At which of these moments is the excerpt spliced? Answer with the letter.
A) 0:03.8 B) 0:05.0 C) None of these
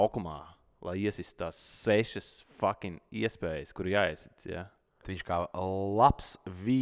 B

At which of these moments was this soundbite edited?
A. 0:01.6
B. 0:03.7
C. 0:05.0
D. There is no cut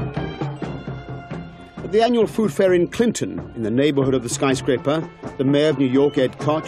C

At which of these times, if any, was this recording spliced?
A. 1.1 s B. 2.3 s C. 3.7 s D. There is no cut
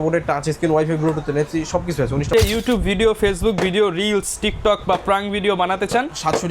B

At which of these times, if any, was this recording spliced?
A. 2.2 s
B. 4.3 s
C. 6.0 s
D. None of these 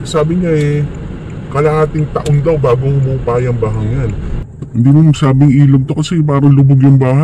B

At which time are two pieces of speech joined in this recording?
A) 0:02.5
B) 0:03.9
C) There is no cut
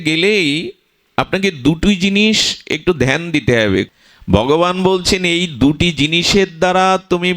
B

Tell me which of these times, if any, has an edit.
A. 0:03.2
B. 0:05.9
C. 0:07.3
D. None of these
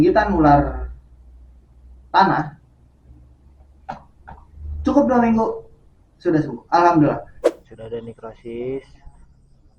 C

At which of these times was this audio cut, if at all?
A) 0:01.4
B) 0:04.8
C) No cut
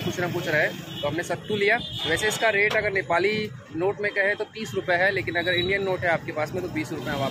C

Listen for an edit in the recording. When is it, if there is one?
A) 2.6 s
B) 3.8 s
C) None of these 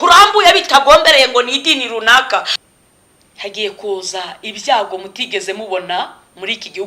A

